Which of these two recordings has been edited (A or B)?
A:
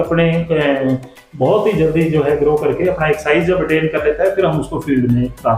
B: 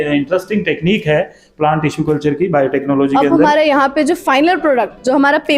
B